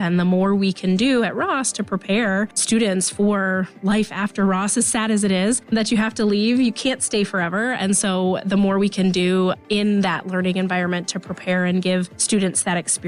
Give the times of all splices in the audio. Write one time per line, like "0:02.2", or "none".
0:02.6
0:05.7
0:12.2